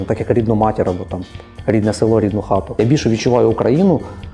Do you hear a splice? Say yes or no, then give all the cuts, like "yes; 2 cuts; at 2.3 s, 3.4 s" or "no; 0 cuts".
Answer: yes; 1 cut; at 2.7 s